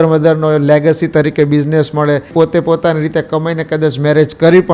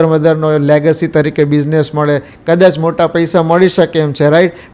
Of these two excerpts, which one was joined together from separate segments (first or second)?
first